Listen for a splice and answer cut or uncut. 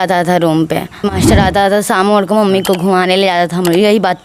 cut